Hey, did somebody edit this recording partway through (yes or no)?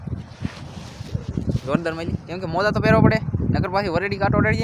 yes